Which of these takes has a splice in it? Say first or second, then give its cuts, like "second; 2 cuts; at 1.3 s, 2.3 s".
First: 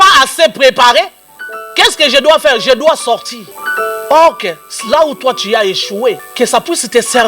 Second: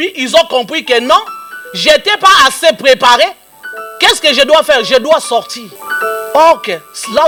first; 1 cut; at 6.3 s